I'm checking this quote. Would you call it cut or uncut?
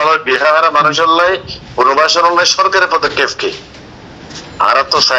uncut